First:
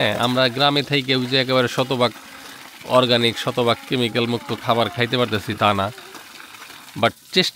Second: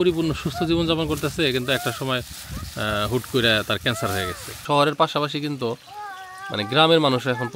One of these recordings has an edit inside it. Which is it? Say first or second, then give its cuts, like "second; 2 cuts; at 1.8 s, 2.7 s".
second; 1 cut; at 4.6 s